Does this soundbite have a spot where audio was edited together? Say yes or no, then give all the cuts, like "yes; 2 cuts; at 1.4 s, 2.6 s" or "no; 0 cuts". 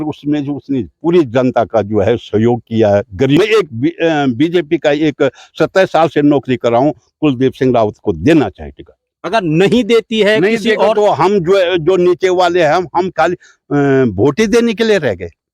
yes; 1 cut; at 3.4 s